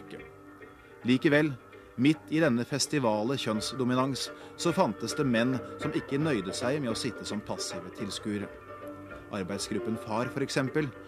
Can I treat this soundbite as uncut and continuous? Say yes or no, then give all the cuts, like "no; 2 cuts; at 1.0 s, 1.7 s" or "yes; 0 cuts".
yes; 0 cuts